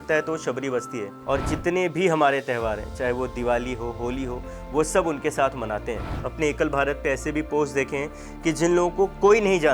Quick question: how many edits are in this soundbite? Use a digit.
2